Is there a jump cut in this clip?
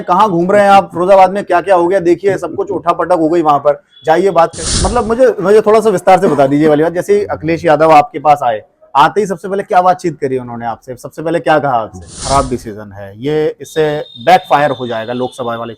yes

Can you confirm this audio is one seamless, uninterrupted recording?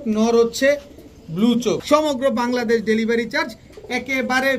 no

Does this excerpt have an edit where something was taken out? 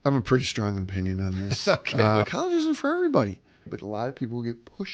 yes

